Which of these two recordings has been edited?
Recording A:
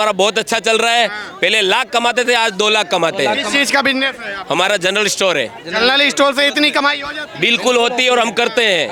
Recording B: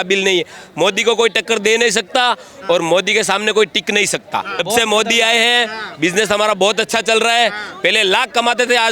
B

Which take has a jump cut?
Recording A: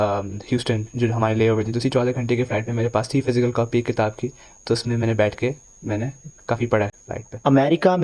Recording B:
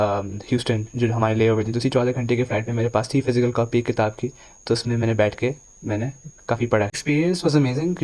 B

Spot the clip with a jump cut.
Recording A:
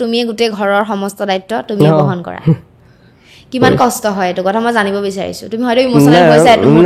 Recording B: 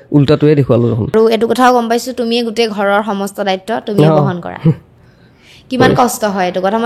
B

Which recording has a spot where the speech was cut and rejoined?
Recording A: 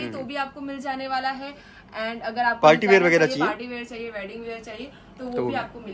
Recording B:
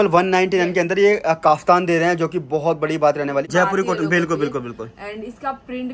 B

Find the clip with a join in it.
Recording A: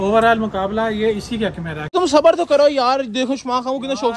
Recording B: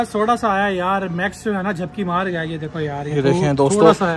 A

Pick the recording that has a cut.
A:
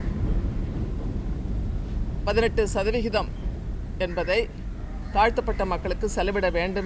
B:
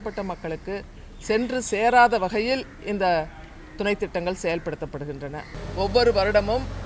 B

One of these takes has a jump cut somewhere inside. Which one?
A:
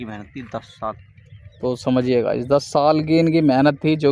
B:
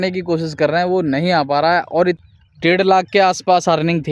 B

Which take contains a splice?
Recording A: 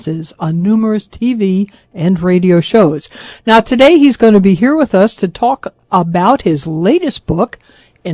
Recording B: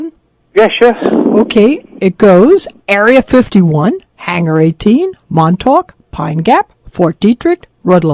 B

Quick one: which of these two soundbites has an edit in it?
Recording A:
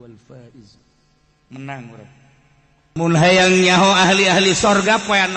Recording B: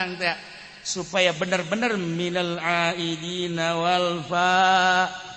A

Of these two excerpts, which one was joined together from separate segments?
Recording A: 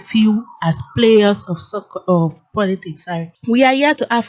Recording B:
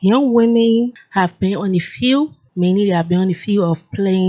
A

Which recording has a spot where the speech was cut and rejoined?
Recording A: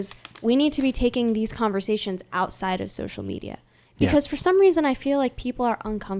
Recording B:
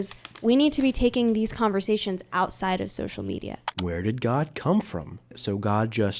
B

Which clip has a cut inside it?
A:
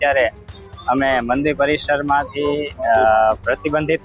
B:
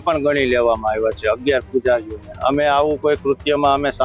B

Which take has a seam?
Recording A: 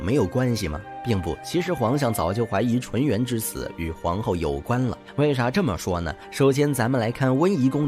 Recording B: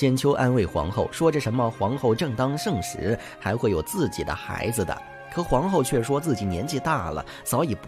A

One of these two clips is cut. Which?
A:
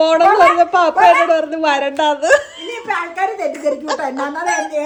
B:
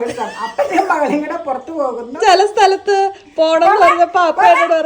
B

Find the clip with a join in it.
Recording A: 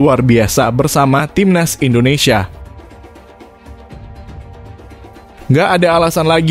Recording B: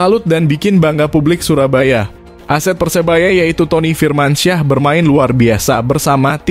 A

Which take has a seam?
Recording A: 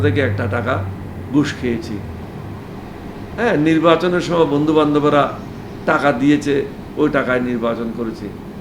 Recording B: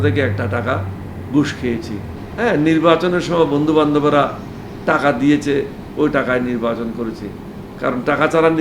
B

